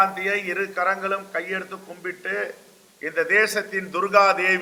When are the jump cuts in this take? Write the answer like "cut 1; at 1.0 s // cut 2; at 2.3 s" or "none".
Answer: none